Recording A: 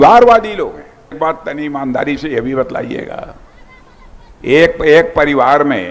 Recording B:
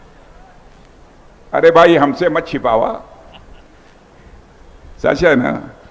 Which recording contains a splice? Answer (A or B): A